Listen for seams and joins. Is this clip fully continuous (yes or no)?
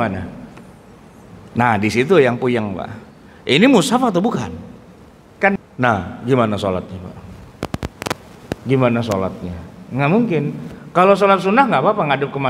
no